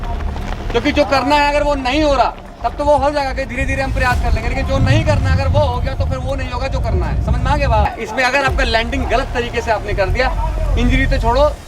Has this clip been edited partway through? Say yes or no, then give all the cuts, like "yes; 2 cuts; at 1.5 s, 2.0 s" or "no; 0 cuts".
yes; 1 cut; at 7.9 s